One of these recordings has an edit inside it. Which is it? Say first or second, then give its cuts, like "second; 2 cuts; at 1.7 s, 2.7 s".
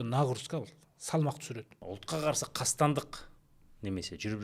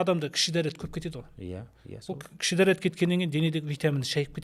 first; 1 cut; at 1.8 s